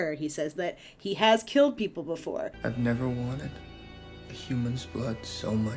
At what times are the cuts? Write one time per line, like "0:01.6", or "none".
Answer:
0:02.5